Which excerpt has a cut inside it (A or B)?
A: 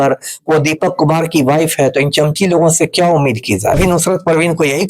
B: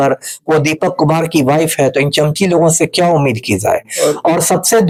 A